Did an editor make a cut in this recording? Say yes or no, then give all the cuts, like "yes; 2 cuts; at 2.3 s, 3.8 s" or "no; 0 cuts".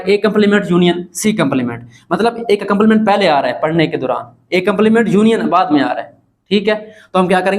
no; 0 cuts